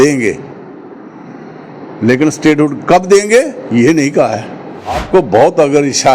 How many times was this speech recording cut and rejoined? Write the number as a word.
one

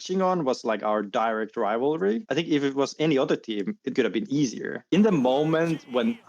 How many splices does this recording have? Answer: three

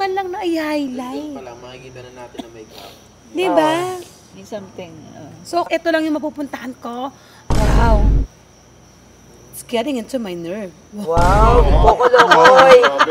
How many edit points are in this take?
one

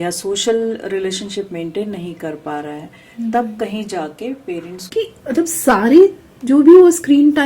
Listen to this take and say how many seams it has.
one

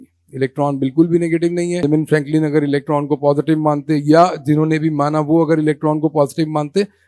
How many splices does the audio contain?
one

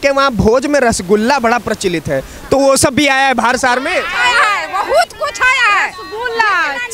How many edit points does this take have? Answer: zero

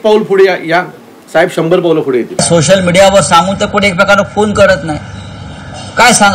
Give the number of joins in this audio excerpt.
one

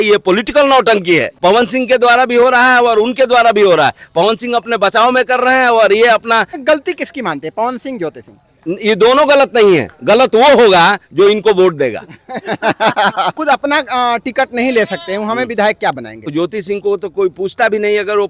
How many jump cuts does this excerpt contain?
four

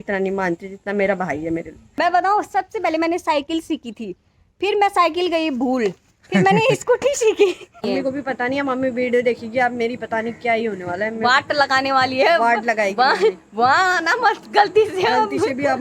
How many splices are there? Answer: three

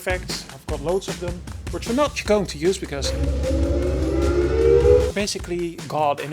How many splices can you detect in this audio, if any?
one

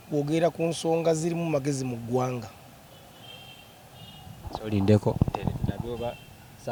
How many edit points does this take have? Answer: zero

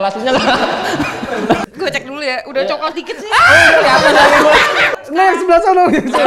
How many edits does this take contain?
two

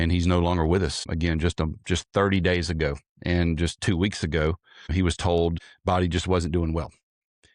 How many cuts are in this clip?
one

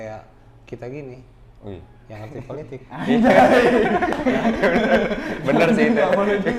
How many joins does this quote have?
zero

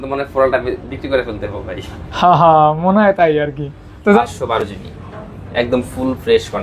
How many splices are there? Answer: one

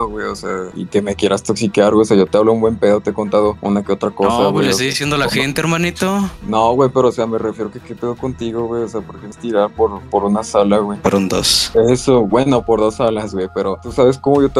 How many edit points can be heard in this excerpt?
zero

